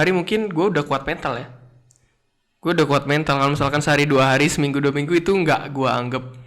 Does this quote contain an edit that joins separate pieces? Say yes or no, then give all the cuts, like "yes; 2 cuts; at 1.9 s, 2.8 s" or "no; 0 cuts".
no; 0 cuts